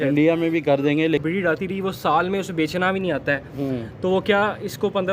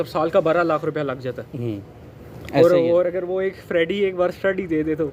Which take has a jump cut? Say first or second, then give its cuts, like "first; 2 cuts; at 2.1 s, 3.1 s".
first; 1 cut; at 1.2 s